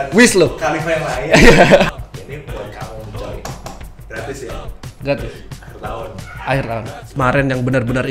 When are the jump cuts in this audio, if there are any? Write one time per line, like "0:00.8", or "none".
0:01.9
0:07.1